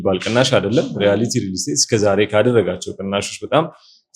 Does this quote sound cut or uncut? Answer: uncut